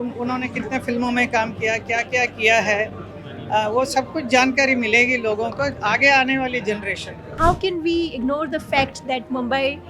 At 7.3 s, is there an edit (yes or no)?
yes